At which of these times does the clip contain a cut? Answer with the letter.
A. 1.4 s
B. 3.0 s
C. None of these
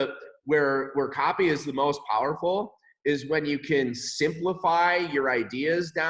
C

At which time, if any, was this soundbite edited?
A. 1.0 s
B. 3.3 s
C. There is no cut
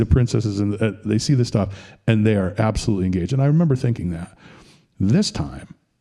C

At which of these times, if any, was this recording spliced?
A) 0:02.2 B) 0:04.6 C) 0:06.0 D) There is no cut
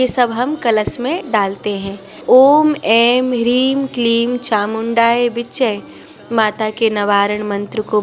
A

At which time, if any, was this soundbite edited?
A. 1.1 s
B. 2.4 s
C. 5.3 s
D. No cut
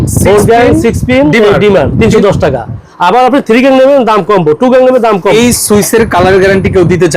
C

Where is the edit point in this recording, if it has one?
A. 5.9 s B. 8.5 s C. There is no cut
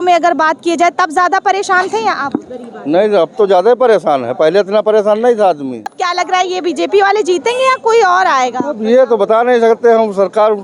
A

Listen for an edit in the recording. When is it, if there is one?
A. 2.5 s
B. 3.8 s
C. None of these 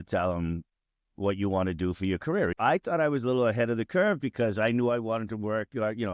A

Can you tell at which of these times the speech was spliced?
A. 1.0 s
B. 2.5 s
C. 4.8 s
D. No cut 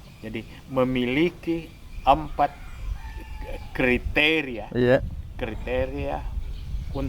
D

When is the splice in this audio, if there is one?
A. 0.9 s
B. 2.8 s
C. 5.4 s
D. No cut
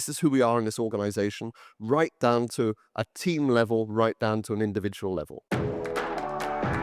C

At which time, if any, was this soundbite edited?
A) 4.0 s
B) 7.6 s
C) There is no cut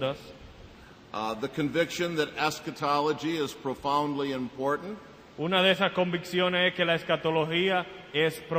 B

